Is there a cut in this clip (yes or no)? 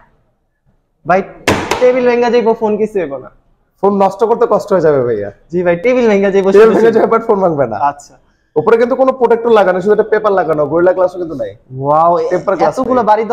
no